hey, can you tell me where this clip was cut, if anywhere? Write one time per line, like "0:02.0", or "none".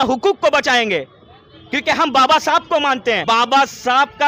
0:03.2